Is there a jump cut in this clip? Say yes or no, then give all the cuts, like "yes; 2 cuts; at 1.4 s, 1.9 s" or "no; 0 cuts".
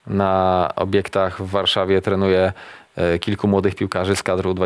no; 0 cuts